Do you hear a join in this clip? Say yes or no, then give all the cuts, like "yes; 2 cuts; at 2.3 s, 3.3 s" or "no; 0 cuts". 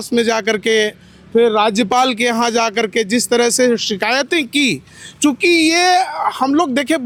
no; 0 cuts